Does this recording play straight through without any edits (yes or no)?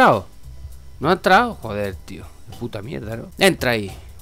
no